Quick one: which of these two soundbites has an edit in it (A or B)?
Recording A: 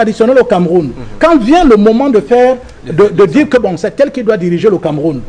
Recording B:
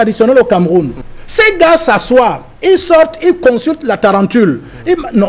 B